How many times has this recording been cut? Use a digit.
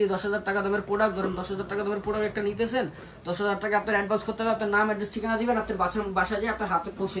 0